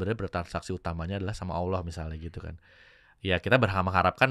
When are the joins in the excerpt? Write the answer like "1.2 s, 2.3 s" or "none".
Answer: none